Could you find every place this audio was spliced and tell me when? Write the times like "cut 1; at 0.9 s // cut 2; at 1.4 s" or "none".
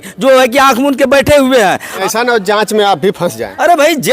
cut 1; at 2.0 s